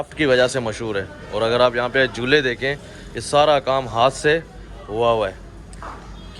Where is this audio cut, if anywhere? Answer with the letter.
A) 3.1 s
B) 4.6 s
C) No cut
C